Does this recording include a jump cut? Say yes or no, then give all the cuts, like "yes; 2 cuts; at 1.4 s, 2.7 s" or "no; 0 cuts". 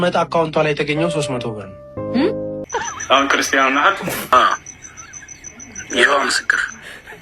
yes; 2 cuts; at 2.6 s, 4.3 s